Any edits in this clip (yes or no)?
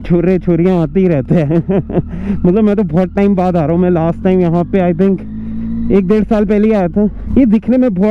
no